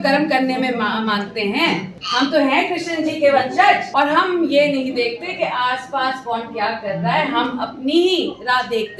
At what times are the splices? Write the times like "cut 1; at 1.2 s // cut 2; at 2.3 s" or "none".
cut 1; at 2.0 s // cut 2; at 3.9 s

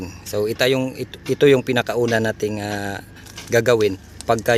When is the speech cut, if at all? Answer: none

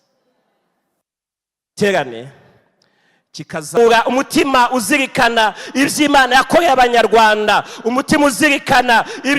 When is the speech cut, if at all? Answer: cut 1; at 3.8 s

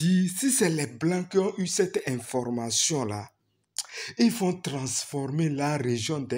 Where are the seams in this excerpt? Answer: none

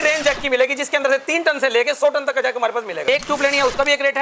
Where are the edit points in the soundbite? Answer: cut 1; at 3.0 s

